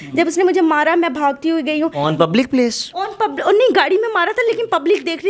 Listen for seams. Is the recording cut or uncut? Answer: uncut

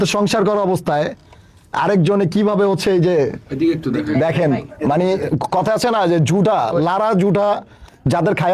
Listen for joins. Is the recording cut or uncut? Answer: uncut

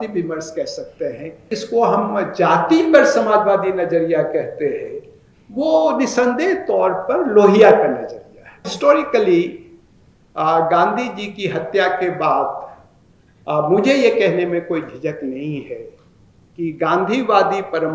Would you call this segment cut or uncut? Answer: cut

